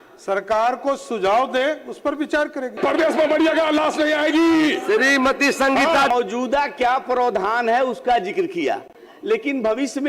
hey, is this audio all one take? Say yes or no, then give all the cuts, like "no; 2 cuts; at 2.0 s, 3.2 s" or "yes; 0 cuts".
no; 2 cuts; at 2.8 s, 6.1 s